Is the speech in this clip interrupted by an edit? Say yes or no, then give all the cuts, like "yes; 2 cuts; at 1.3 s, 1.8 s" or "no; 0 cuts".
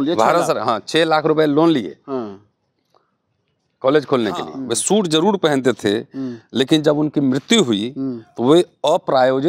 yes; 1 cut; at 4.6 s